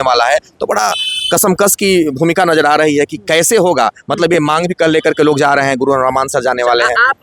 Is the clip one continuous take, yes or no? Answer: yes